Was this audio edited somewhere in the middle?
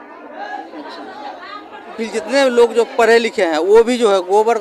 yes; 1 cut; at 2.0 s

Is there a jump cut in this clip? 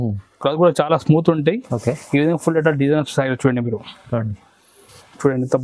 no; 0 cuts

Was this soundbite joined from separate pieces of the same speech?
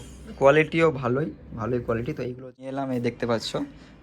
yes; 1 cut; at 2.5 s

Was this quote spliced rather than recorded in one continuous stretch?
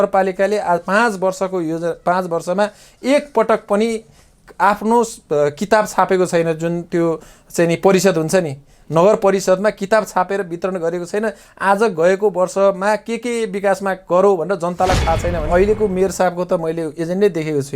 yes; 1 cut; at 15.5 s

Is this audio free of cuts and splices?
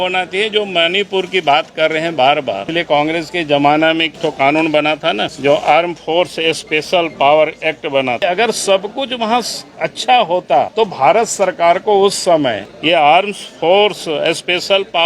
no; 6 cuts; at 2.6 s, 4.1 s, 5.3 s, 8.2 s, 10.7 s, 12.7 s

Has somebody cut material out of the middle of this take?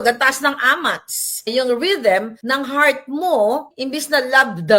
yes; 3 cuts; at 1.5 s, 2.4 s, 3.7 s

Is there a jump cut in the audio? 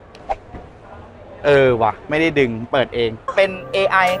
yes; 1 cut; at 3.3 s

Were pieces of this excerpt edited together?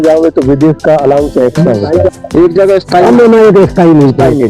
yes; 1 cut; at 2.1 s

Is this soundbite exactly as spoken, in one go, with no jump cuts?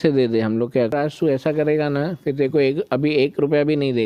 no; 1 cut; at 0.9 s

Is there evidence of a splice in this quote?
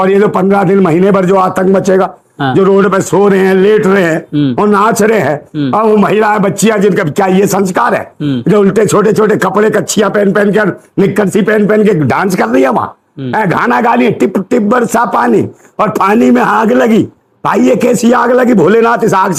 no; 0 cuts

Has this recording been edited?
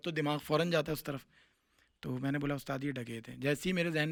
no; 0 cuts

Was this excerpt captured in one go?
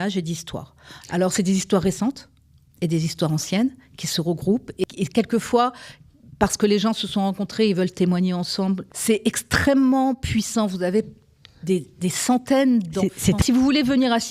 no; 3 cuts; at 4.8 s, 8.9 s, 13.4 s

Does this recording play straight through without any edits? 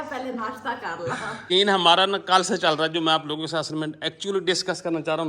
no; 1 cut; at 1.3 s

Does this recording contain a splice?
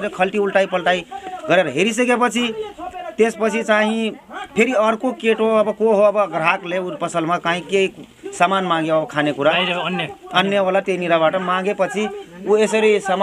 no; 0 cuts

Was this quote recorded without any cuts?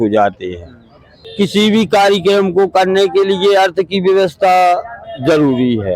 no; 1 cut; at 1.3 s

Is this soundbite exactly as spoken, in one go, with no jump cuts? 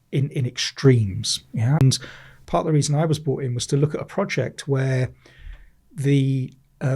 no; 1 cut; at 1.8 s

